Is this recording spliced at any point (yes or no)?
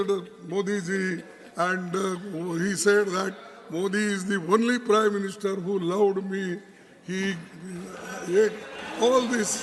no